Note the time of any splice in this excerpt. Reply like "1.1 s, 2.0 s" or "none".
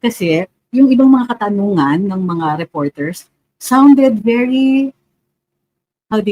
none